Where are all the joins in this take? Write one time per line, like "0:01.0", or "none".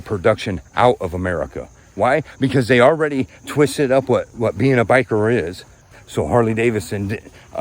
0:06.0